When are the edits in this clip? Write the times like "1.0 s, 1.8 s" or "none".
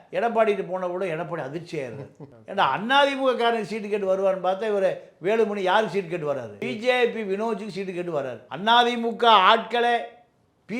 6.6 s, 8.5 s

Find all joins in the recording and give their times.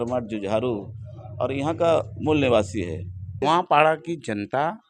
3.4 s

